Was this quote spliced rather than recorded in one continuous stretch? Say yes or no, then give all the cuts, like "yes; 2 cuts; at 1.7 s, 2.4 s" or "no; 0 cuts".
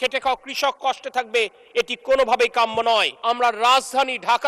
yes; 1 cut; at 3.1 s